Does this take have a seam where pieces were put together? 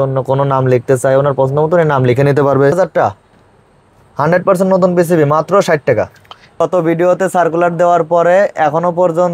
yes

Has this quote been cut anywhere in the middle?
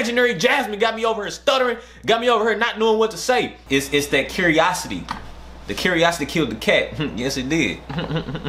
yes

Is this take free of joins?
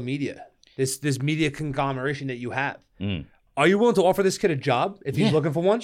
yes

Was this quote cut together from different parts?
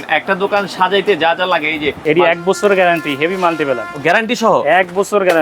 yes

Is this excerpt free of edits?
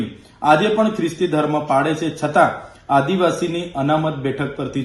yes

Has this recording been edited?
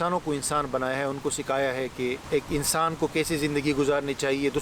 yes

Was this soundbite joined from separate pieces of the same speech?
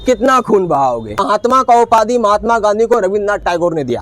yes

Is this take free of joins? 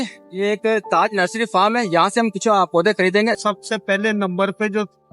no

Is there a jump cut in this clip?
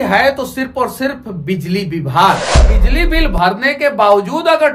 yes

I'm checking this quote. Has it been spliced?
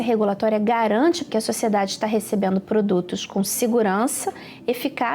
yes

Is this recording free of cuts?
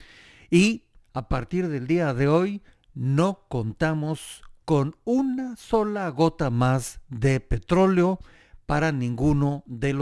yes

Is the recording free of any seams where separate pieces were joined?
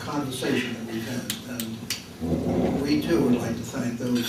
yes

